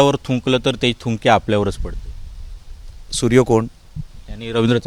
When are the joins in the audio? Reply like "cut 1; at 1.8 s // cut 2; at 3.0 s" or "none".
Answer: none